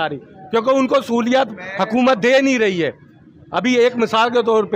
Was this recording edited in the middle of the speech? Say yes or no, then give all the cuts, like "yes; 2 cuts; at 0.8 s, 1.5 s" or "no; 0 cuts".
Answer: no; 0 cuts